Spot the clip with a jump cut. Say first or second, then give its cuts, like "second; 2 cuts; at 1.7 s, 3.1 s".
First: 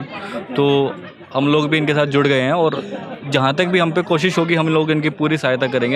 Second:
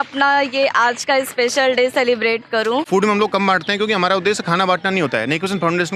second; 1 cut; at 2.9 s